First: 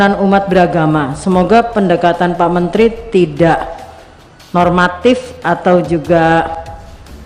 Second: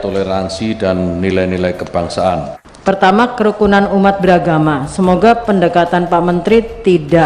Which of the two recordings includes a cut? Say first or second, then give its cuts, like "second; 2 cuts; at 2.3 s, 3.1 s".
second; 1 cut; at 2.6 s